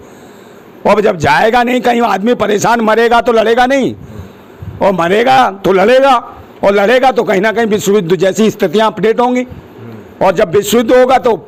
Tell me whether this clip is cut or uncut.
uncut